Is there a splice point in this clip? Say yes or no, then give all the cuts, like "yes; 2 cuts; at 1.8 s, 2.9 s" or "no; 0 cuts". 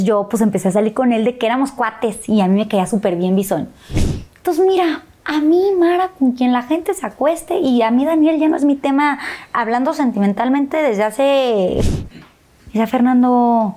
yes; 2 cuts; at 3.9 s, 11.9 s